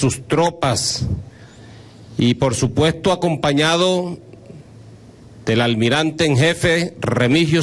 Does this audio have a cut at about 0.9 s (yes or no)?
yes